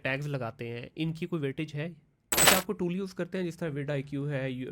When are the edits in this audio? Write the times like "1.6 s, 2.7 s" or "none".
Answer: 2.4 s